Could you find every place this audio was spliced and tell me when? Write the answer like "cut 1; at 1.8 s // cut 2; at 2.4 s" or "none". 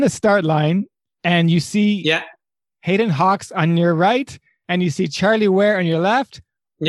none